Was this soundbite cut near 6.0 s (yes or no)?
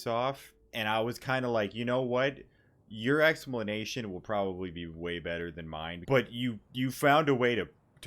yes